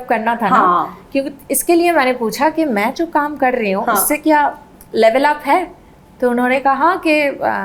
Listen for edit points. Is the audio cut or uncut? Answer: uncut